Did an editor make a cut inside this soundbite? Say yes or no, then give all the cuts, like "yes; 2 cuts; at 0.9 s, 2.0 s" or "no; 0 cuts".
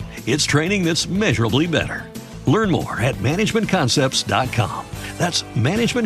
no; 0 cuts